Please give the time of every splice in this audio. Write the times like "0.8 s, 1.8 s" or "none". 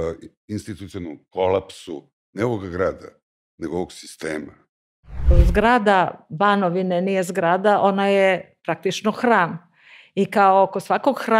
5.3 s